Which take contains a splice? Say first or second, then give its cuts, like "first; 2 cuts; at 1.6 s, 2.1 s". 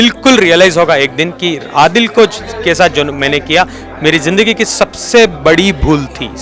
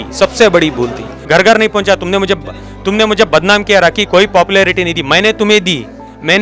second; 1 cut; at 1.1 s